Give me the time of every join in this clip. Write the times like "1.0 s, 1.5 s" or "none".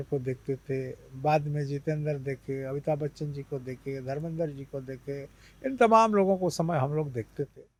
none